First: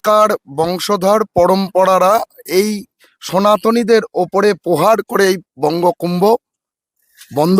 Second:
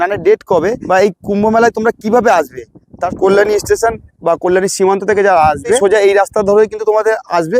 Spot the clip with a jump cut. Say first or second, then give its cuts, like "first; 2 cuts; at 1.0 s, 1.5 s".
second; 3 cuts; at 0.8 s, 3.0 s, 5.8 s